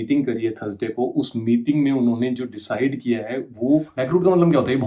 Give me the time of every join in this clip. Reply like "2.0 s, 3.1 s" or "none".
3.9 s